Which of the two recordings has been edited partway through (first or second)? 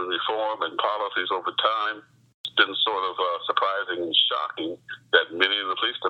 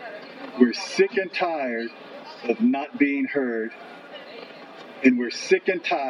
first